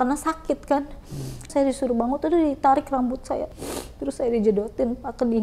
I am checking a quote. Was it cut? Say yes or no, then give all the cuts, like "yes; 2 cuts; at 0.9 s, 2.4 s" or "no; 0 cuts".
yes; 2 cuts; at 1.5 s, 3.5 s